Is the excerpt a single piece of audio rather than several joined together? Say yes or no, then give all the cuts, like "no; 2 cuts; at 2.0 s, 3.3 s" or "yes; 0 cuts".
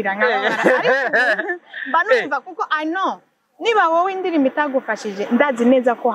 yes; 0 cuts